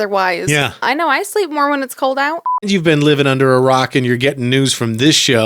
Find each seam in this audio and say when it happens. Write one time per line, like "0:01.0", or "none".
0:00.8
0:02.7